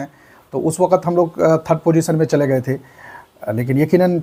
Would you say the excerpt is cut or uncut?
uncut